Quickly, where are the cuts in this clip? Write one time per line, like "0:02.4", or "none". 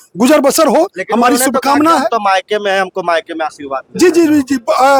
none